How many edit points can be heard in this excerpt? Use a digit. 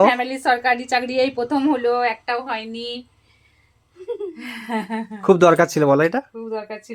0